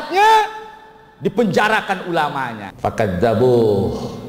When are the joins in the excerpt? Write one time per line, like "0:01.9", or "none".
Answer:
0:02.6